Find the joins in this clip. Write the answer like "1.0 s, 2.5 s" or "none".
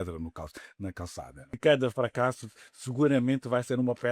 1.5 s